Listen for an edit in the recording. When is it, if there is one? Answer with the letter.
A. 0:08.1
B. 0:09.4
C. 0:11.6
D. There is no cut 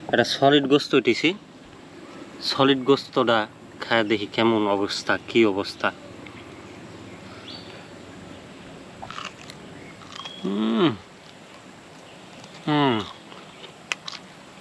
D